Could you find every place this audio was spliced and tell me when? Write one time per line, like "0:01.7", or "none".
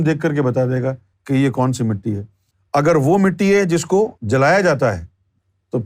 0:01.1